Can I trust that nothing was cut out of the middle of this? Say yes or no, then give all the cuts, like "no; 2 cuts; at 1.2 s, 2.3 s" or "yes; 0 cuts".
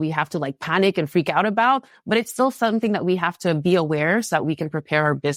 yes; 0 cuts